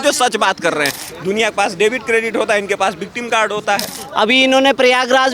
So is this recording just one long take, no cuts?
no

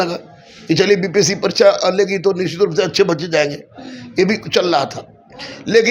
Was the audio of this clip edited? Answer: no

